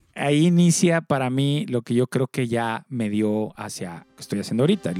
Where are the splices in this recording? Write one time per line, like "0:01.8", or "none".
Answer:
none